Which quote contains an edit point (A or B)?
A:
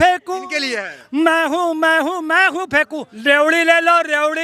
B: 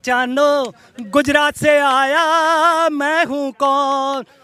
A